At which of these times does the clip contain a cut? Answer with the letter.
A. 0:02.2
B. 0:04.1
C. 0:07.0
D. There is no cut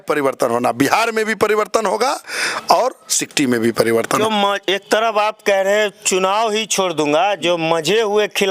B